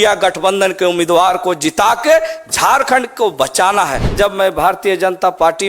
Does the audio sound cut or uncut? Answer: cut